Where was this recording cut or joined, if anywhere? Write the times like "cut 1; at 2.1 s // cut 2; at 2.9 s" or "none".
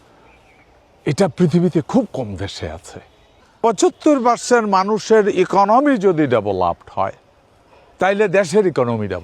cut 1; at 3.6 s